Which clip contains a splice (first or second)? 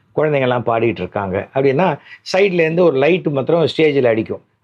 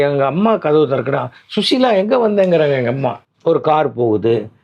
second